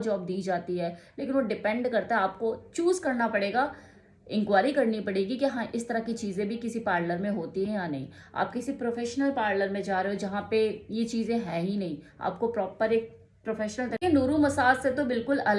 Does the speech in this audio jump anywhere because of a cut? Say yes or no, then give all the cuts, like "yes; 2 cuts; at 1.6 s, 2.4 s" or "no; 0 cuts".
yes; 1 cut; at 13.9 s